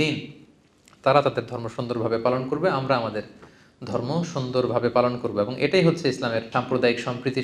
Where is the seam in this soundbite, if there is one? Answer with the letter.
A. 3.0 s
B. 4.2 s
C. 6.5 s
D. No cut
C